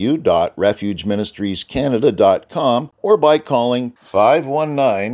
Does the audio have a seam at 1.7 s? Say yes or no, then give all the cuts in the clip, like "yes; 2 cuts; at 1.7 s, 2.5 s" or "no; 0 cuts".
no; 1 cut; at 2.9 s